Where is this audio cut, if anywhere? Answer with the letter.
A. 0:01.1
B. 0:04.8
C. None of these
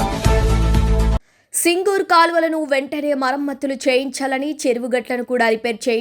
A